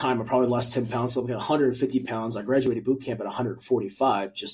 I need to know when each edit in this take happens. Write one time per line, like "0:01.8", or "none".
none